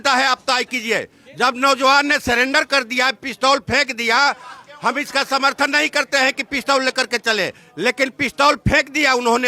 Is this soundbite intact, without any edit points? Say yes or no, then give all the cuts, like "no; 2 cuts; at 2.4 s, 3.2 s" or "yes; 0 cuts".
yes; 0 cuts